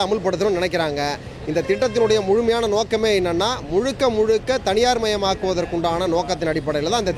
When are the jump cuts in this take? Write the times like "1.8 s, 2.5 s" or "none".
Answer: none